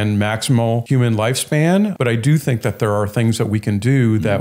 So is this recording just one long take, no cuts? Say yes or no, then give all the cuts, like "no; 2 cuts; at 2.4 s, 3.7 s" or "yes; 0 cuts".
no; 2 cuts; at 0.8 s, 1.9 s